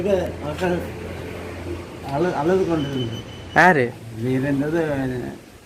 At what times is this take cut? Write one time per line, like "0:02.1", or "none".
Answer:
0:04.1